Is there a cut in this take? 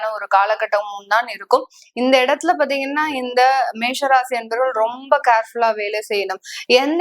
no; 0 cuts

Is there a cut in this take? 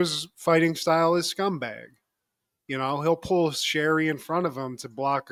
no; 0 cuts

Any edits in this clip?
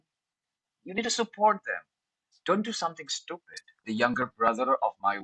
yes; 1 cut; at 3.8 s

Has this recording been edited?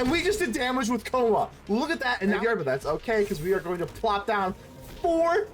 yes; 1 cut; at 2.4 s

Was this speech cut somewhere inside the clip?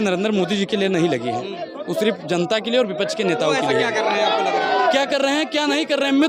no; 0 cuts

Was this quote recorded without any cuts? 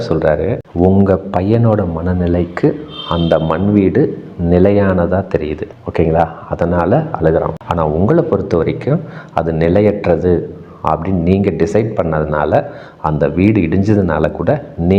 yes; 0 cuts

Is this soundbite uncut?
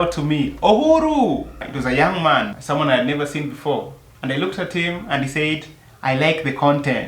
yes; 0 cuts

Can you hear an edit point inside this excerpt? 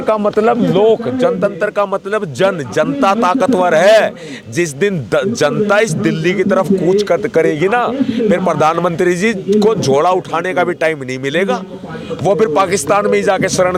no; 0 cuts

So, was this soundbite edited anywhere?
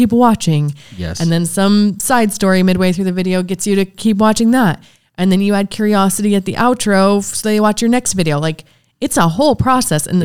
no; 0 cuts

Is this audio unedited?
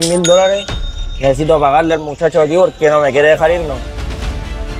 no; 1 cut; at 3.8 s

